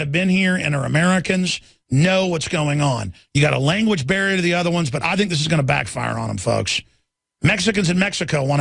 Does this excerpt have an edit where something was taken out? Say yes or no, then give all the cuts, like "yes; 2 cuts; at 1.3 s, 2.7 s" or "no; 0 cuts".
no; 0 cuts